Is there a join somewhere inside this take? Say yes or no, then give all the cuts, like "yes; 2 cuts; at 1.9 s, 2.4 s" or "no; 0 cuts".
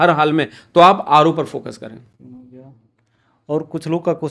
no; 0 cuts